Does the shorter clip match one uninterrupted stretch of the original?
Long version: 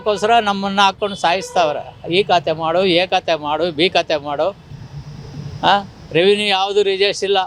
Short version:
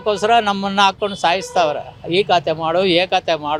yes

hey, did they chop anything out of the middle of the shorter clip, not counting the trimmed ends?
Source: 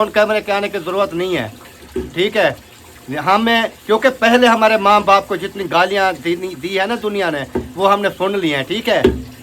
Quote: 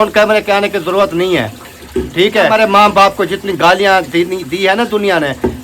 yes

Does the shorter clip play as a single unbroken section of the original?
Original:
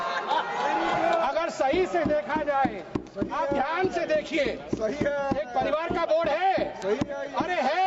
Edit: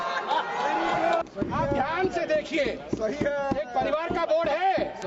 no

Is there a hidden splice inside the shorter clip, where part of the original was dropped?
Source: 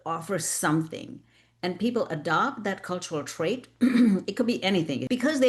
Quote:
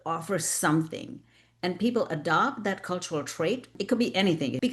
yes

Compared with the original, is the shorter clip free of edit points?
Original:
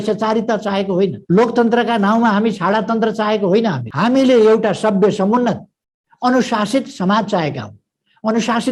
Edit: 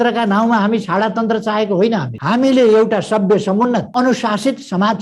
no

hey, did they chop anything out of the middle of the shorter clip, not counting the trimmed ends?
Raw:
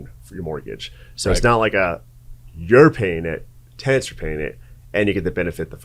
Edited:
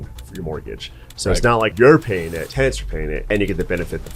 yes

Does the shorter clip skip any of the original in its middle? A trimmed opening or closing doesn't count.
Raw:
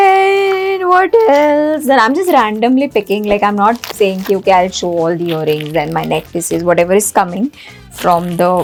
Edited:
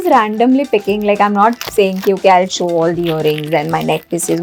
no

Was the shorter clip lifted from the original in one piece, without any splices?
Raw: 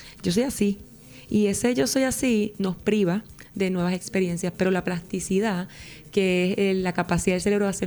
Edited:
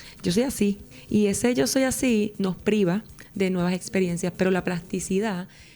no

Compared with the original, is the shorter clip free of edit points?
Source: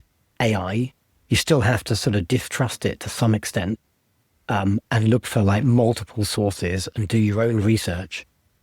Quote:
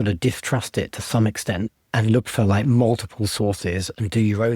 no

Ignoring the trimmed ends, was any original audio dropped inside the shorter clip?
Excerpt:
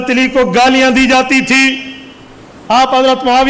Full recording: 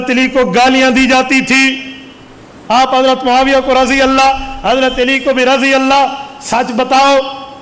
no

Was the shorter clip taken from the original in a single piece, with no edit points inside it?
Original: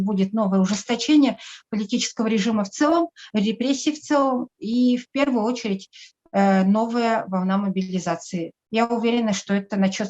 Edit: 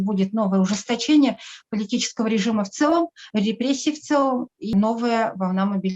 no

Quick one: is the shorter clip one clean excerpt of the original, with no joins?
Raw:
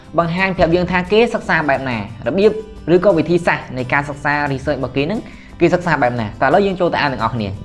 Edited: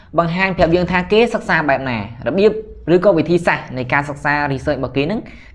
yes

